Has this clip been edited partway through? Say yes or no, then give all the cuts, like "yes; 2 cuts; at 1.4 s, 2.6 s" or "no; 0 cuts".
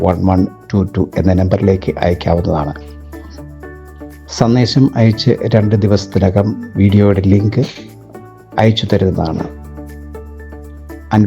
yes; 2 cuts; at 2.8 s, 4.2 s